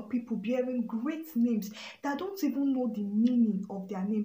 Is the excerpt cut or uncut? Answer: uncut